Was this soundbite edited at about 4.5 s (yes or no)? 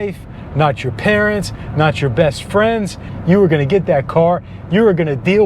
no